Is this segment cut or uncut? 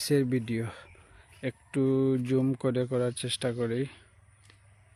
uncut